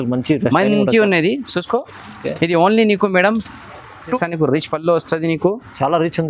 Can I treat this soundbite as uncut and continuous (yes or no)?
no